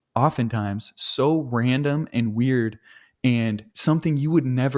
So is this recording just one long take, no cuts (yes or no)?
no